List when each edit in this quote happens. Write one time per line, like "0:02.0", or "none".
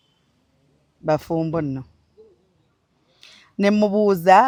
none